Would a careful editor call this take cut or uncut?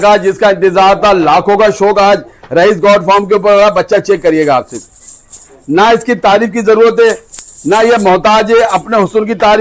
uncut